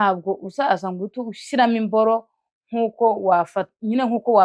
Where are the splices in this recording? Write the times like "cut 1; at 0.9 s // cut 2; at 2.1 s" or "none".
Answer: none